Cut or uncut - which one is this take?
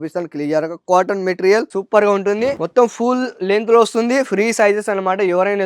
cut